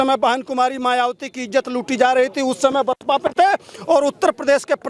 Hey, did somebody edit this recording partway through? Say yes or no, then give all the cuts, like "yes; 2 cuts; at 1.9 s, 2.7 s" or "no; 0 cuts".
no; 0 cuts